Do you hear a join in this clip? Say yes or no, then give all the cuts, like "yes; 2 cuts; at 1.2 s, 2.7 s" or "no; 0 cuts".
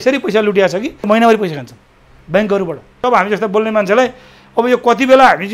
yes; 2 cuts; at 1.1 s, 3.0 s